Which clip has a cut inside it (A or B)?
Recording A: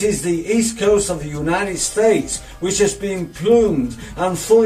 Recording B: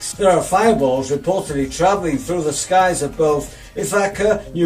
A